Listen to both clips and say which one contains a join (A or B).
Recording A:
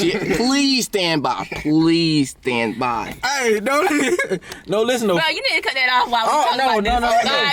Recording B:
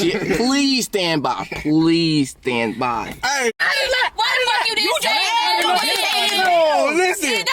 B